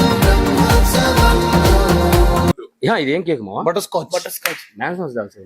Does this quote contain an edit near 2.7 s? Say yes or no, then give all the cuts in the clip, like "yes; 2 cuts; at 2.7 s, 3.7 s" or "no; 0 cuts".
yes; 1 cut; at 2.7 s